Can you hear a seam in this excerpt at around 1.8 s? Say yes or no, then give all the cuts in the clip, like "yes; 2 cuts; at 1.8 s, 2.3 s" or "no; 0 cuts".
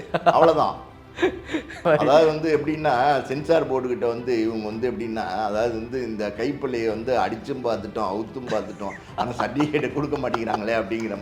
yes; 1 cut; at 1.8 s